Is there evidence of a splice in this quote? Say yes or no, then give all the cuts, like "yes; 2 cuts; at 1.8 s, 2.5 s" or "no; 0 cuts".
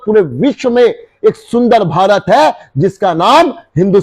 no; 0 cuts